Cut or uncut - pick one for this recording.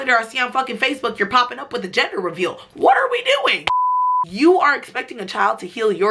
cut